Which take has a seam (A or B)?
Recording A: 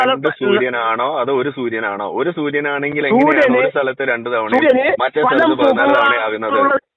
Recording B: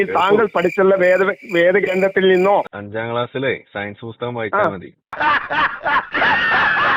B